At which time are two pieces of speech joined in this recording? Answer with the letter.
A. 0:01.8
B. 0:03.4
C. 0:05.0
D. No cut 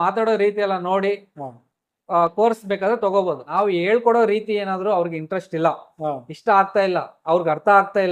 B